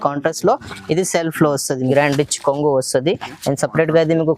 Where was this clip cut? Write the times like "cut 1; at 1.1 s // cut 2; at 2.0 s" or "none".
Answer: cut 1; at 1.9 s